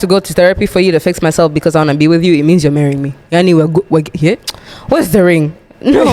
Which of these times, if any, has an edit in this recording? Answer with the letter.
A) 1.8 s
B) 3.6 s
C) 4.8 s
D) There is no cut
D